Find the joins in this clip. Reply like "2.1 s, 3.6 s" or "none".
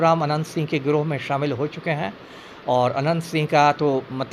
none